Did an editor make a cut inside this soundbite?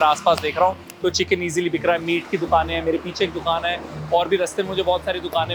no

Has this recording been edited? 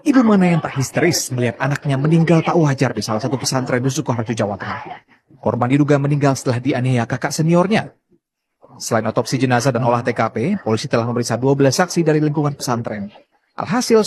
no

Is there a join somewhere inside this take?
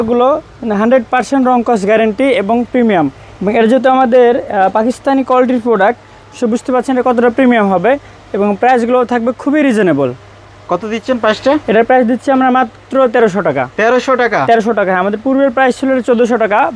no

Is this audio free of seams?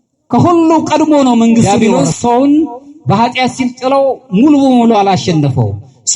no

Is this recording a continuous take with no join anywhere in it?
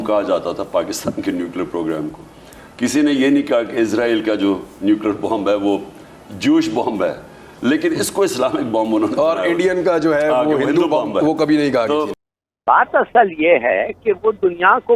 no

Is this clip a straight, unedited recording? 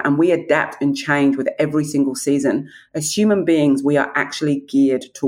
yes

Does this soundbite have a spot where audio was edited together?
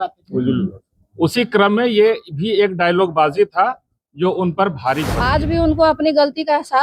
yes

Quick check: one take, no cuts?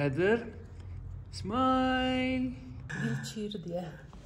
no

